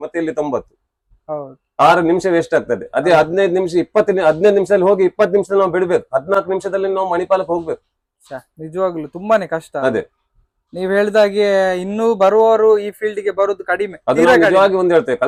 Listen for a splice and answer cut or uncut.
uncut